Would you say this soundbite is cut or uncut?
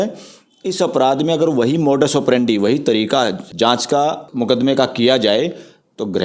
cut